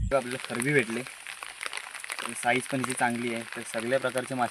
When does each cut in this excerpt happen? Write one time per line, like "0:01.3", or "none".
none